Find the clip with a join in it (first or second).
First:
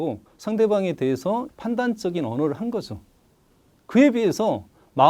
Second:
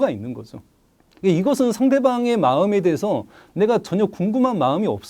first